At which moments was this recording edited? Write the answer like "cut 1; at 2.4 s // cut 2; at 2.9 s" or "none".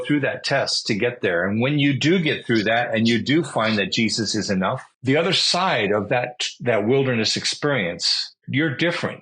cut 1; at 4.9 s // cut 2; at 8.4 s